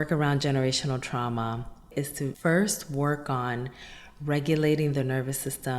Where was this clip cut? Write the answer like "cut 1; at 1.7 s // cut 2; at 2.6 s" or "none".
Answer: cut 1; at 1.9 s